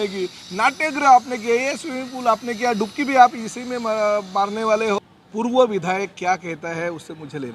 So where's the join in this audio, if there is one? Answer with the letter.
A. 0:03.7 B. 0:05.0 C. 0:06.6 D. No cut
B